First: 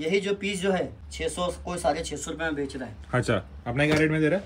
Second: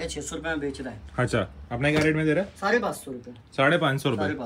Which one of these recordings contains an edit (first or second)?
first